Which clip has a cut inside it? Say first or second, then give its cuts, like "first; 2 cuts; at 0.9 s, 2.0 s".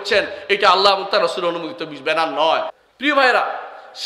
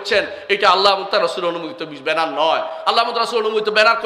first; 1 cut; at 2.7 s